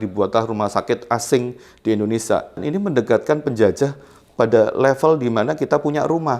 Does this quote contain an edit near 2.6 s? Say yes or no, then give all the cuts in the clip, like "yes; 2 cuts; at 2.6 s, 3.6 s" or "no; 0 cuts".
yes; 1 cut; at 2.6 s